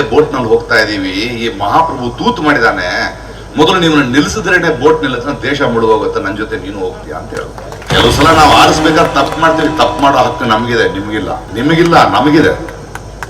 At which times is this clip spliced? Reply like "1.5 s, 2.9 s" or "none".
7.8 s, 11.4 s